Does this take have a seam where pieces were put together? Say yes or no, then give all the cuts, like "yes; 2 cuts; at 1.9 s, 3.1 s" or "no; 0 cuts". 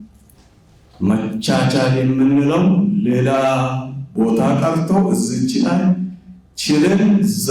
no; 0 cuts